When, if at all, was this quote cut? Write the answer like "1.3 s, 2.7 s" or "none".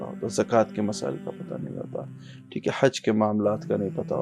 none